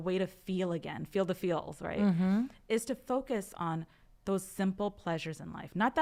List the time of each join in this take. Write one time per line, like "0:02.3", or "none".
none